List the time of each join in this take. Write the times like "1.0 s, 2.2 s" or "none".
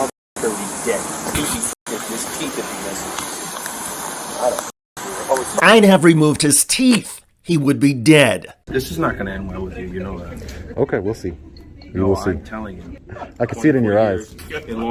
none